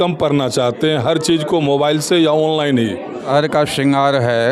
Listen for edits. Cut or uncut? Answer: cut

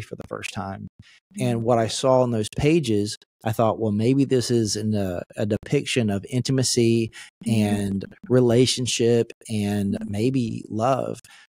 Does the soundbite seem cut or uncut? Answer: uncut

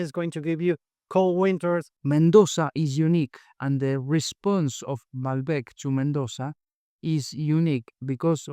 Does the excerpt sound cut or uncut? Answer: cut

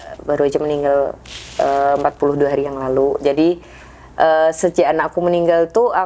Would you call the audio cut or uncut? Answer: uncut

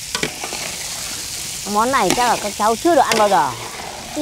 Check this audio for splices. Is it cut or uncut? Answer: uncut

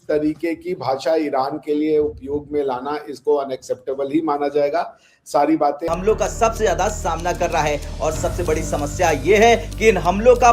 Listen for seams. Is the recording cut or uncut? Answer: cut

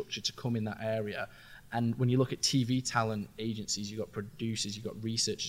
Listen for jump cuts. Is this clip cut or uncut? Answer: uncut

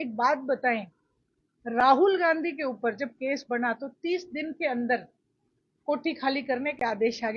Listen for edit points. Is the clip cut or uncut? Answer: uncut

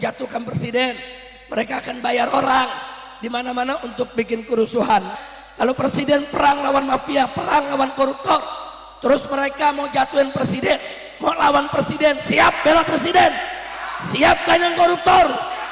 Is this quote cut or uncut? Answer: cut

